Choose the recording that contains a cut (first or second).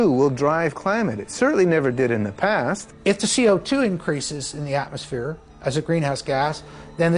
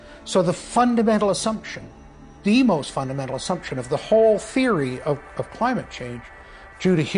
first